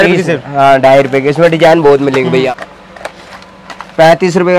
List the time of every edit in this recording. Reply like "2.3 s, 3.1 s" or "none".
2.5 s